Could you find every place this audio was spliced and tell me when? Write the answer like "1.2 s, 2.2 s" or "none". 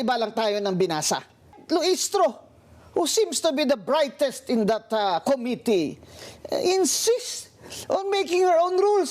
1.5 s